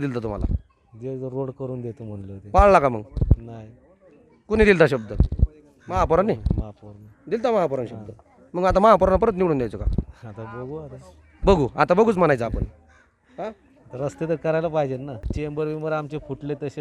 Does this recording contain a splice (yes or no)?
yes